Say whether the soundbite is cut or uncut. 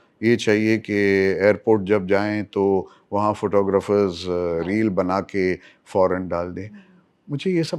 uncut